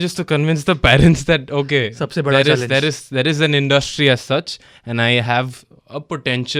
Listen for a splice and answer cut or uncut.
uncut